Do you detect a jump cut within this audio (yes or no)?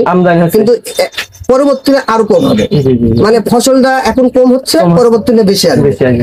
no